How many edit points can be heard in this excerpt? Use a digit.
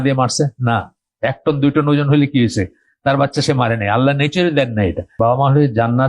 1